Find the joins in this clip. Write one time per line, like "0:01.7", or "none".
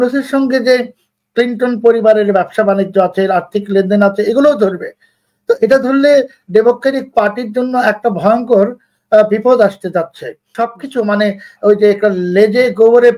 0:10.5